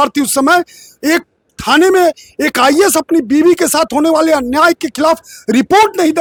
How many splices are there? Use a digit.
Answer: 0